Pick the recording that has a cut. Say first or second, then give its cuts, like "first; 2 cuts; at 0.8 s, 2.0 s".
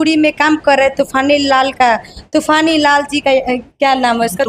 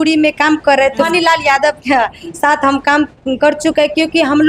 second; 1 cut; at 1.1 s